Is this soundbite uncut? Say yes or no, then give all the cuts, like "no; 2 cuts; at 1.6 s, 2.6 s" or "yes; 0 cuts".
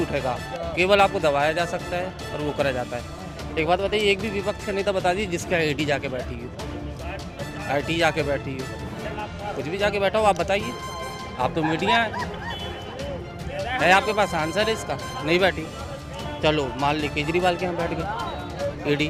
yes; 0 cuts